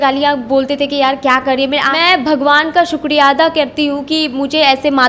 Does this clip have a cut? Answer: yes; 1 cut; at 1.9 s

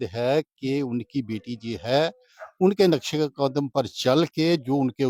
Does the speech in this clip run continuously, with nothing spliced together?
yes; 0 cuts

